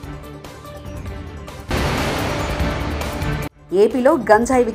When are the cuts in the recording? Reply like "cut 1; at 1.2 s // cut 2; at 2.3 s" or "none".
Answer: cut 1; at 1.7 s // cut 2; at 3.5 s

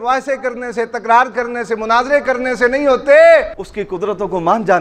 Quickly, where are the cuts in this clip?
cut 1; at 3.6 s

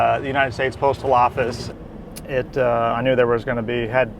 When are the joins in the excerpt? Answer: cut 1; at 1.7 s

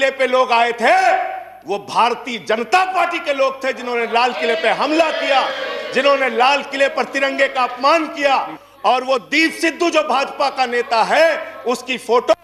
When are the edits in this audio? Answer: none

